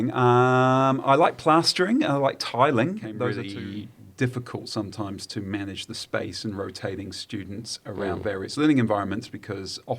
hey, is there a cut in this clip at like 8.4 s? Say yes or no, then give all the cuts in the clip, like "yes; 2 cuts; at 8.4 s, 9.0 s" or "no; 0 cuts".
no; 1 cut; at 3.4 s